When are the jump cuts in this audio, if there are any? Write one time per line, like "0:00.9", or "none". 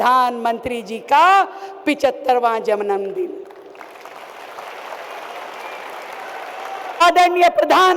0:07.0